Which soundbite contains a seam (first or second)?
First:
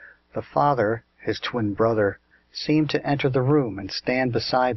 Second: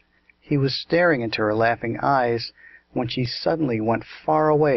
second